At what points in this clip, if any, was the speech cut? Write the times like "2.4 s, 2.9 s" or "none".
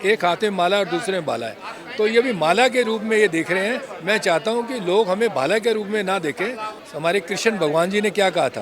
6.7 s